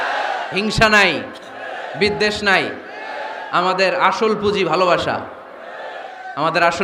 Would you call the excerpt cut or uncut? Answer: uncut